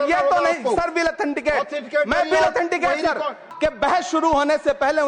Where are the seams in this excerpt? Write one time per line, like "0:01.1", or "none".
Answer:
0:03.5